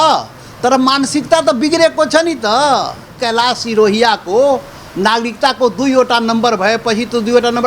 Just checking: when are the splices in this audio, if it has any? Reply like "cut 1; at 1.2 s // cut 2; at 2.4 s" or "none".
cut 1; at 3.1 s

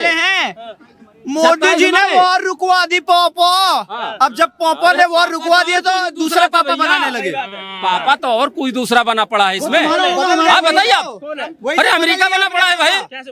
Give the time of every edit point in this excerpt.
none

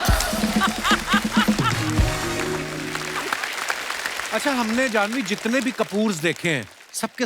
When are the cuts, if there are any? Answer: cut 1; at 3.0 s // cut 2; at 4.2 s

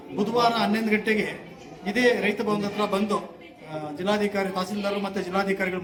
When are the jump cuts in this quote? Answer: none

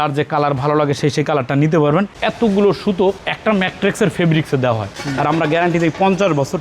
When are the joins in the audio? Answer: cut 1; at 2.2 s // cut 2; at 4.9 s

